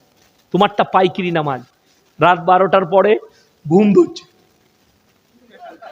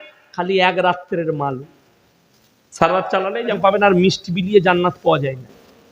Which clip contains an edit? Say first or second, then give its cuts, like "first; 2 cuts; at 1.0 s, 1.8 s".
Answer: second; 1 cut; at 3.5 s